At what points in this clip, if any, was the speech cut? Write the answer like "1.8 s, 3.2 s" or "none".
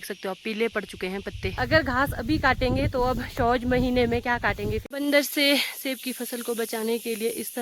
1.6 s, 4.9 s